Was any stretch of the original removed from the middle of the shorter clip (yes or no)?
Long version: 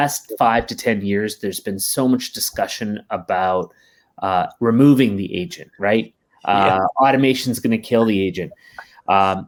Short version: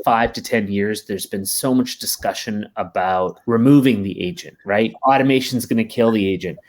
yes